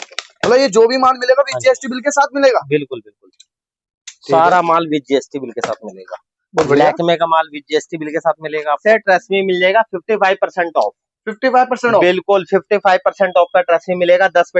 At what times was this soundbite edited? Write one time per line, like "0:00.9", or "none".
0:08.8